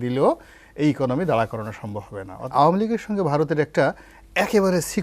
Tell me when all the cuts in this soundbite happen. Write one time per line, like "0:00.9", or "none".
0:02.5